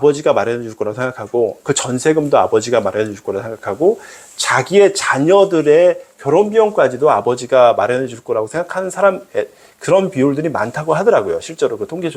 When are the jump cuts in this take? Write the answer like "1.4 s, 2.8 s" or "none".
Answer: none